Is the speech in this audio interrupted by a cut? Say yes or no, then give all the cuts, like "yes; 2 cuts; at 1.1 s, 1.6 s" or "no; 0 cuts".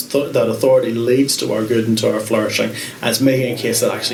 no; 0 cuts